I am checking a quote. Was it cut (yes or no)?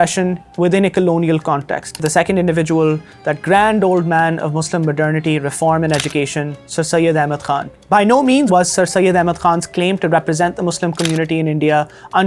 yes